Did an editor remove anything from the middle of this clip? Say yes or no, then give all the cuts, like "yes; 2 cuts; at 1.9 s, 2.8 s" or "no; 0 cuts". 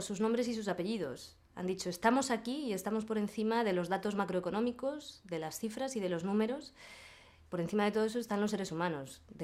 yes; 1 cut; at 1.8 s